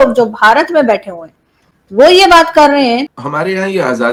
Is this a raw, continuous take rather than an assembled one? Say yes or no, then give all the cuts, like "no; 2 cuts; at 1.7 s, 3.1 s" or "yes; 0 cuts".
yes; 0 cuts